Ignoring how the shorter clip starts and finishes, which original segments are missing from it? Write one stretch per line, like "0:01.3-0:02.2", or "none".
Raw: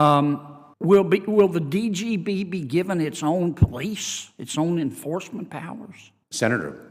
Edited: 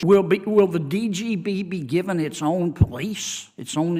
none